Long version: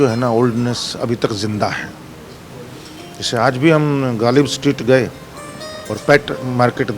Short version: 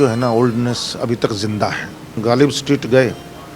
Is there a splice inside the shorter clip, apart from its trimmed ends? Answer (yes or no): yes